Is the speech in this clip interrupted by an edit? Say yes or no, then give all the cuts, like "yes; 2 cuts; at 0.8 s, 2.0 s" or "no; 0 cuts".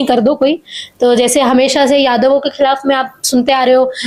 no; 0 cuts